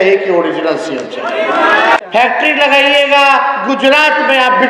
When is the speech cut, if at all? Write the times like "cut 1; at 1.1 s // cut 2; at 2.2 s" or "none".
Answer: cut 1; at 2.0 s